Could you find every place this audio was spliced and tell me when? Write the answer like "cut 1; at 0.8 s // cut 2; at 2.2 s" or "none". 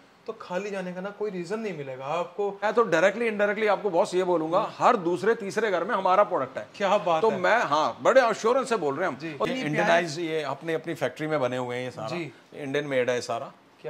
cut 1; at 2.6 s // cut 2; at 9.5 s

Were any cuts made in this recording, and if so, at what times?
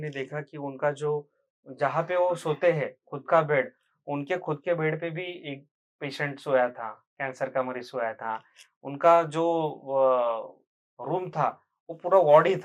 none

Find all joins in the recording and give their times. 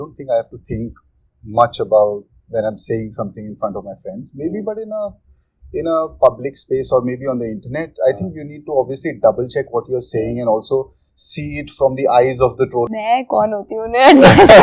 cut 1; at 12.9 s

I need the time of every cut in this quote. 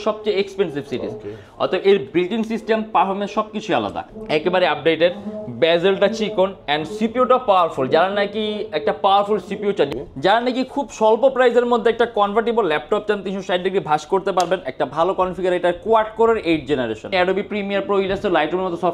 cut 1; at 4.1 s // cut 2; at 9.9 s // cut 3; at 17.1 s

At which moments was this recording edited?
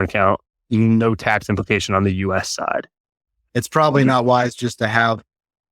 cut 1; at 3.3 s

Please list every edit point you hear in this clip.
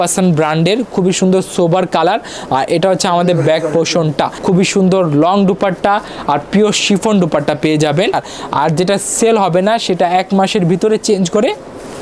cut 1; at 4.3 s // cut 2; at 8.3 s

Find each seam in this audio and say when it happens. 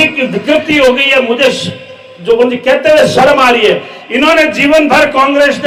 none

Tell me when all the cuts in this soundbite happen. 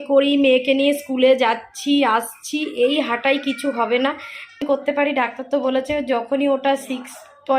cut 1; at 4.6 s

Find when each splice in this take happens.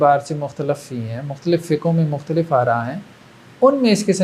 none

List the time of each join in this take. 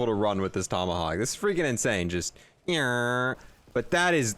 cut 1; at 3.4 s

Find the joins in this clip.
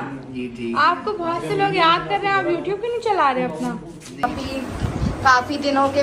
cut 1; at 4.0 s

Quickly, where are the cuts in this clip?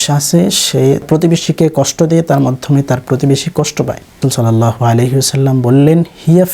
cut 1; at 1.1 s // cut 2; at 4.2 s

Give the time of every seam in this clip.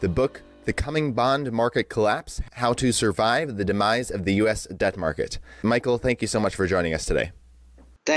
cut 1; at 3.3 s

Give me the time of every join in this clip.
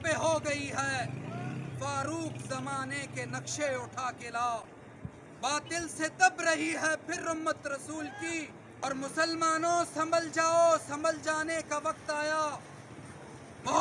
cut 1; at 8.8 s

